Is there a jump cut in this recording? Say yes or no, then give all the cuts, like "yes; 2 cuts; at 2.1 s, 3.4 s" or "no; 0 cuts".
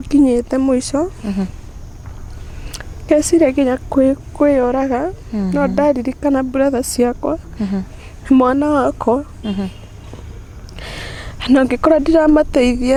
no; 0 cuts